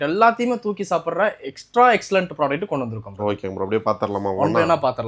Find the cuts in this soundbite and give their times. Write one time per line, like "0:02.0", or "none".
none

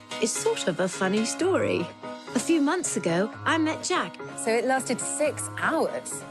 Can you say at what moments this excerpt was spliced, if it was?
none

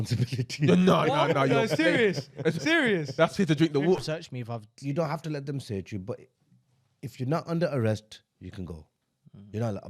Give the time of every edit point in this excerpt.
0:04.0

